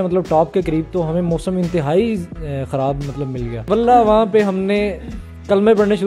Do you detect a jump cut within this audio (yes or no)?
yes